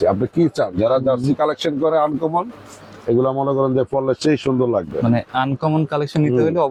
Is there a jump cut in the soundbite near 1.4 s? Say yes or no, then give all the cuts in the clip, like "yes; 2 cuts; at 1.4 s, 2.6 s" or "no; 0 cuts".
no; 0 cuts